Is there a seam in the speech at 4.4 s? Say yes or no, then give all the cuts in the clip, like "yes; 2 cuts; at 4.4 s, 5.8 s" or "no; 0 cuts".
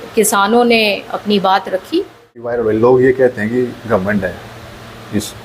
no; 1 cut; at 2.5 s